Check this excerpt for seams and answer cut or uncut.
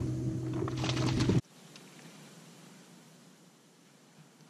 cut